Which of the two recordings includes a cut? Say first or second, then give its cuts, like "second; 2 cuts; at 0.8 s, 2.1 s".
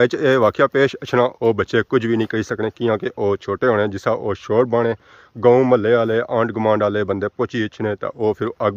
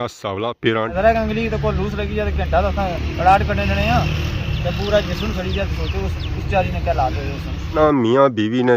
second; 2 cuts; at 0.9 s, 7.7 s